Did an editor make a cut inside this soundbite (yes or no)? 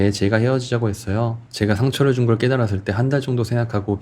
yes